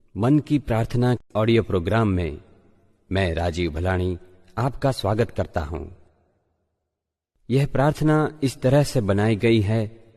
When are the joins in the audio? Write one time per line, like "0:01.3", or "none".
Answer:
0:01.2